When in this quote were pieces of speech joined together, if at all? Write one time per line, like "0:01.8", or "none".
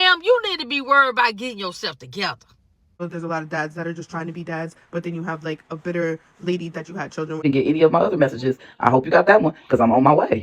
0:03.0
0:07.4